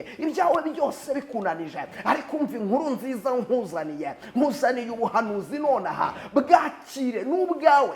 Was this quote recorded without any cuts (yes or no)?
yes